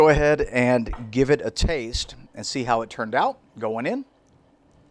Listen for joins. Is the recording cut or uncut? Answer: uncut